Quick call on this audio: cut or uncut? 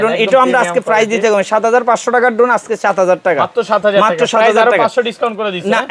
uncut